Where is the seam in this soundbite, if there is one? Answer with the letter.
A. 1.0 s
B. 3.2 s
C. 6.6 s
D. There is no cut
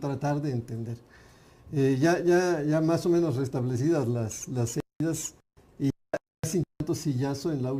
C